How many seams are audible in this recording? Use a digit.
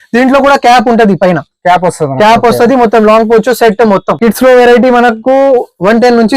1